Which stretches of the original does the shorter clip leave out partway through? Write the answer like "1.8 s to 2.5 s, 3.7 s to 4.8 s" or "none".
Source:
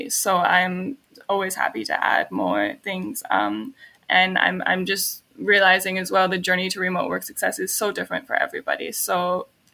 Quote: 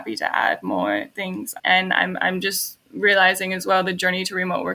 3.1 s to 3.9 s